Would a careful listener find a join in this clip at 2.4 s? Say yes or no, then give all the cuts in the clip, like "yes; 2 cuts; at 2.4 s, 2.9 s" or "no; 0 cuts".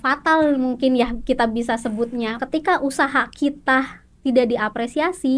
yes; 1 cut; at 2.4 s